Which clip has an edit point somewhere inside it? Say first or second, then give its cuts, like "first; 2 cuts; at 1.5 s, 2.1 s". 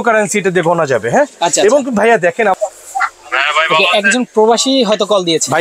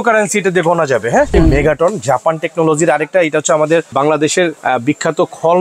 second; 2 cuts; at 1.3 s, 4.3 s